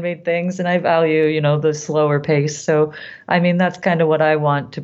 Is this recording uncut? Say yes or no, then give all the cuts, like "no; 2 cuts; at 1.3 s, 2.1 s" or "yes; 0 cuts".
yes; 0 cuts